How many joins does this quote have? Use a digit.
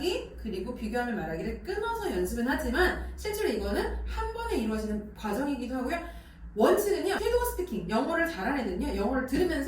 2